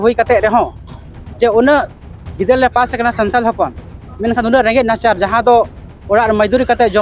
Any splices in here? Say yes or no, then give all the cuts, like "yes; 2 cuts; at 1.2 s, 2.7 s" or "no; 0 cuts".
no; 0 cuts